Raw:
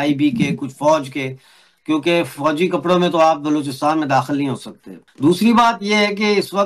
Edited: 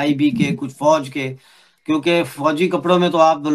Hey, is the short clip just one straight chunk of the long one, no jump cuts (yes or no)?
yes